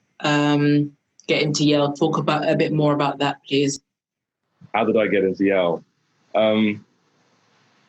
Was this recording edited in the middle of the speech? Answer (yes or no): no